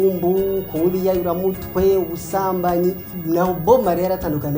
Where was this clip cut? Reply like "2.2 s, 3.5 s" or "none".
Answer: 3.1 s